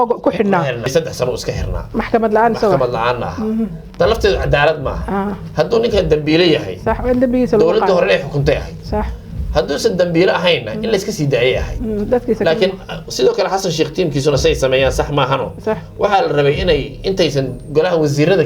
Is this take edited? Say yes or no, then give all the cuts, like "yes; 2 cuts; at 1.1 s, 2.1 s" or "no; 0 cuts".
yes; 1 cut; at 0.9 s